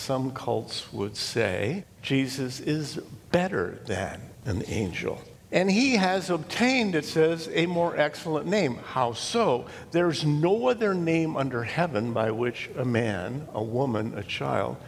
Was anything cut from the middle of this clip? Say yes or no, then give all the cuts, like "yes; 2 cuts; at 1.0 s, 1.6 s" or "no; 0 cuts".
yes; 3 cuts; at 1.9 s, 4.3 s, 5.3 s